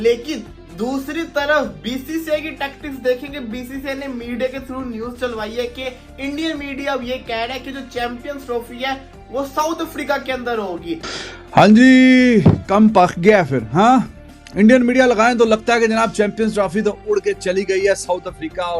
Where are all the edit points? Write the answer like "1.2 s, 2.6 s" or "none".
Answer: 11.1 s

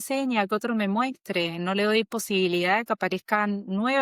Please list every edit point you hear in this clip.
none

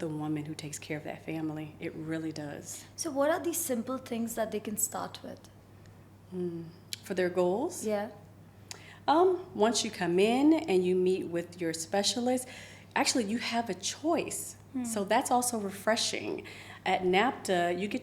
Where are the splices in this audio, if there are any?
none

